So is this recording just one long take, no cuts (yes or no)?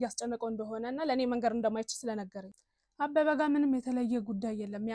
no